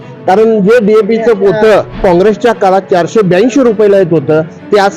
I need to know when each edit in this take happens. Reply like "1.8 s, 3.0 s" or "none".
1.9 s